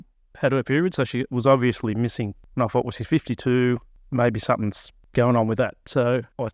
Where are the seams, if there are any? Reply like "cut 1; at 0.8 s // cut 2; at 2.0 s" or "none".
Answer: cut 1; at 2.4 s // cut 2; at 4.0 s // cut 3; at 5.0 s